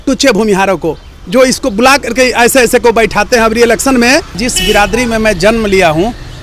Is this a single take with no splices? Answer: no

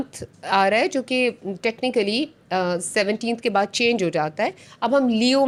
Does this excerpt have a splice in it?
no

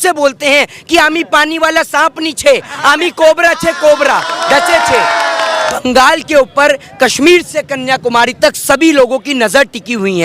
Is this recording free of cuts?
no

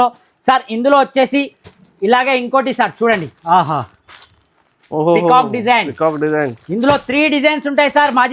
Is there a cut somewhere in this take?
no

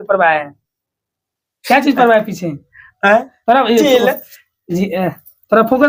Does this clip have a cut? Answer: no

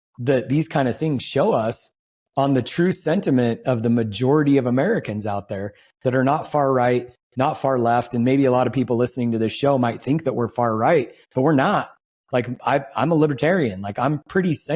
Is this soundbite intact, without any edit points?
yes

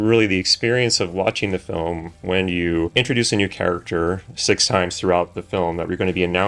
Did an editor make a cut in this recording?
no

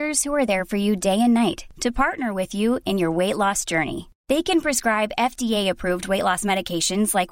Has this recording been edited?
no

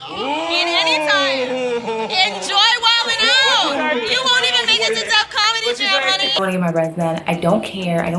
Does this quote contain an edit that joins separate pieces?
yes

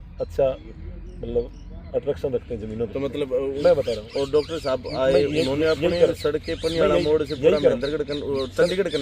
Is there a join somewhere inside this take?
yes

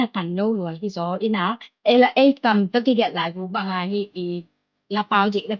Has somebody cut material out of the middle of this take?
yes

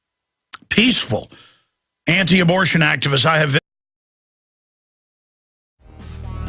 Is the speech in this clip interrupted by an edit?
no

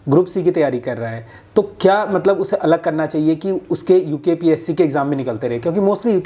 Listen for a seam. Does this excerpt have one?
no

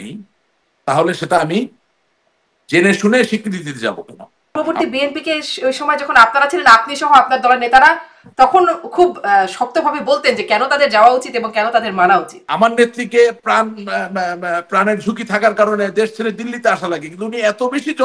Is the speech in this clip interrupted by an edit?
yes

